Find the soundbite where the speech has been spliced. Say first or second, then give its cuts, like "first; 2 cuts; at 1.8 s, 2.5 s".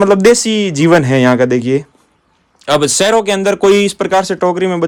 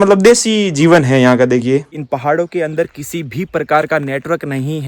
second; 1 cut; at 1.9 s